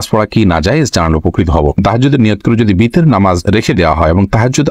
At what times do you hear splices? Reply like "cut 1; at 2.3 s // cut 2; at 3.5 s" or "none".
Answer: cut 1; at 1.8 s